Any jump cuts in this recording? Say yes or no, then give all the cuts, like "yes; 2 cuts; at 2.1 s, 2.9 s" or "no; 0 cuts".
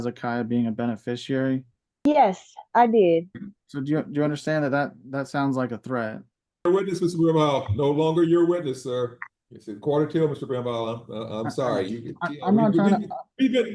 yes; 2 cuts; at 1.8 s, 6.6 s